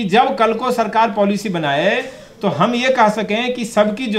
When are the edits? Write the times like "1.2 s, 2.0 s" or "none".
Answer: none